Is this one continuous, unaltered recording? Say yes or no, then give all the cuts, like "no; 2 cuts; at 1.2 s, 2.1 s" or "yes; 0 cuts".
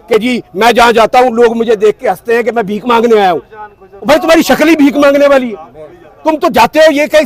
yes; 0 cuts